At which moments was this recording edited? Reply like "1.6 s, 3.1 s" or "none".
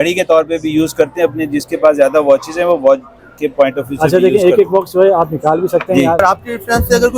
6.2 s